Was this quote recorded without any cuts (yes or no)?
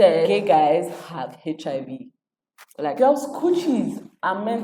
yes